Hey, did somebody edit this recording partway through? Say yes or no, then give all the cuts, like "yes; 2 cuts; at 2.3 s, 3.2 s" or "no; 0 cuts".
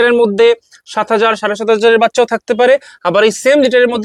no; 0 cuts